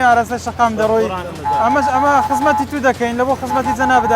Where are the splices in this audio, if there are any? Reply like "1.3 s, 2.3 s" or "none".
1.3 s